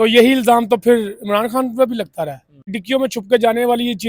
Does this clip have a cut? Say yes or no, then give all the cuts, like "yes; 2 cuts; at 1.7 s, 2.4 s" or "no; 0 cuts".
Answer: yes; 1 cut; at 2.8 s